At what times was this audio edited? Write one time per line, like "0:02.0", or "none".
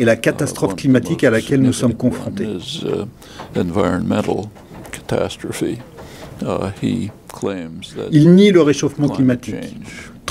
0:05.0